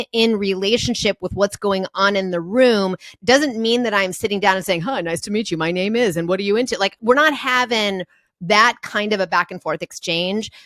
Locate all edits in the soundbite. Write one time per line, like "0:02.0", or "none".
0:03.1
0:07.0

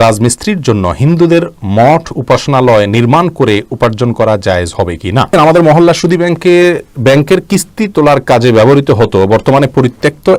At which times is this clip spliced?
0:05.3

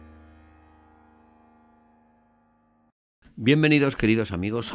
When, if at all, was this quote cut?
0:02.1

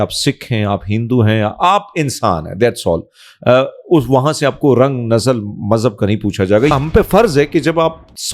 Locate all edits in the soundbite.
0:06.7

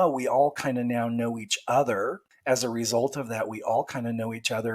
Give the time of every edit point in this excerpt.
0:02.3

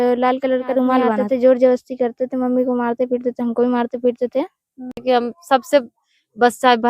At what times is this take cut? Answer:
0:01.2
0:05.0

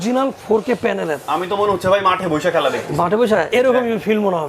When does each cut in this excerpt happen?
0:03.5

